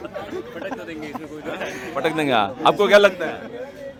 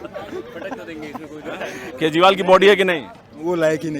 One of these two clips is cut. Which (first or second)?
second